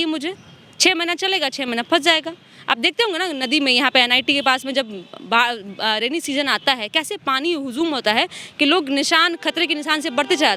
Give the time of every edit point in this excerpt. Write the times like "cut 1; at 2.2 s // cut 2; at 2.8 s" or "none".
none